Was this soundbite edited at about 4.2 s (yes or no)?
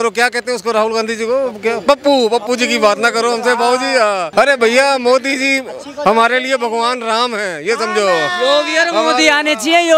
yes